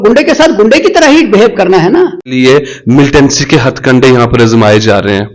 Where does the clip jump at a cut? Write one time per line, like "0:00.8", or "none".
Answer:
0:02.3